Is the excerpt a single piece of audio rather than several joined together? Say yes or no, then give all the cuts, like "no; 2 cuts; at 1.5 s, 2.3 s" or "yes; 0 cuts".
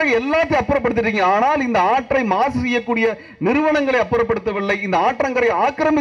yes; 0 cuts